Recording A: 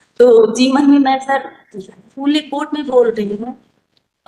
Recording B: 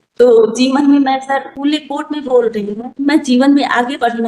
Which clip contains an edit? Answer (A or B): B